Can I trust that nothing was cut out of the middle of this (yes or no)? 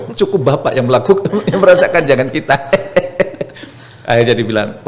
yes